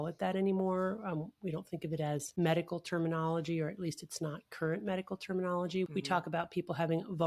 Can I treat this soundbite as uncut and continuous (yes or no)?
no